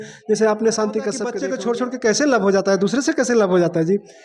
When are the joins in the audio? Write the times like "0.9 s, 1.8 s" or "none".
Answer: 1.3 s